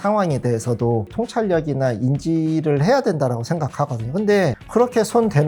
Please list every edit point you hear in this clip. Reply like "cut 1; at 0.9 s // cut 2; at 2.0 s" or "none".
none

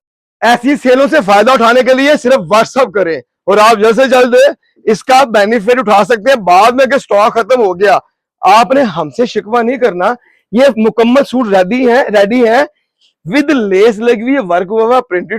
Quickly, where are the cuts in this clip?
none

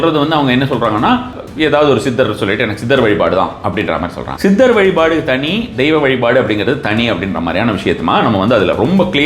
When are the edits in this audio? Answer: cut 1; at 1.4 s // cut 2; at 4.2 s

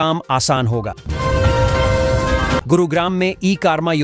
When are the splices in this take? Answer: cut 1; at 1.0 s // cut 2; at 2.6 s

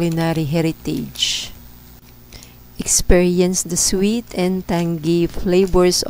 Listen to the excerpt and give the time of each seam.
none

